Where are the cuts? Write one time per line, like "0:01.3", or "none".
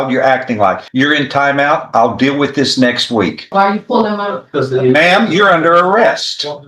0:00.8
0:03.5